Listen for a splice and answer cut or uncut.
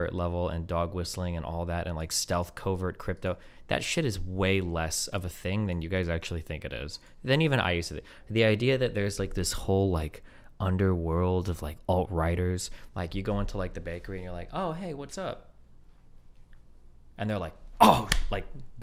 uncut